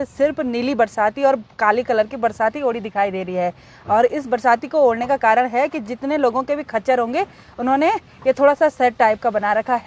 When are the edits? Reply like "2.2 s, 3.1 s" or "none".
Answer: none